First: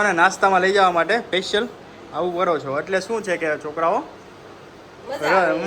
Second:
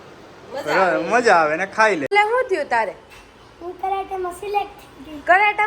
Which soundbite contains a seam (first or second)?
second